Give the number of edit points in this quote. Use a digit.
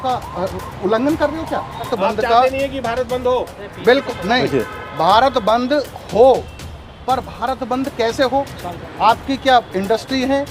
1